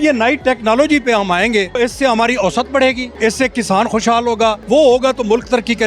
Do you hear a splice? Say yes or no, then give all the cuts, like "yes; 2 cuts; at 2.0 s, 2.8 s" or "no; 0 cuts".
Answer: yes; 2 cuts; at 1.8 s, 4.6 s